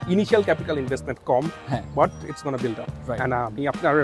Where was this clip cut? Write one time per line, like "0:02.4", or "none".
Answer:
0:02.9